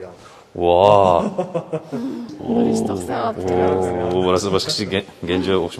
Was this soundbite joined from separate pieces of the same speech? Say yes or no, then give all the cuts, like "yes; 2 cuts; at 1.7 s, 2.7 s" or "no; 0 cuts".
no; 0 cuts